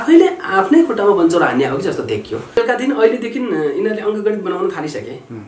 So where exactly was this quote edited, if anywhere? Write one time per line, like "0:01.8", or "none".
0:02.6